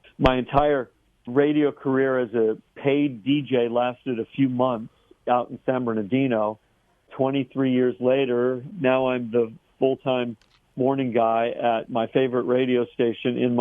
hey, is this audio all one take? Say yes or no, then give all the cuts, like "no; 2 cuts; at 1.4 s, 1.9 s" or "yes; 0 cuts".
no; 3 cuts; at 1.3 s, 7.1 s, 8.7 s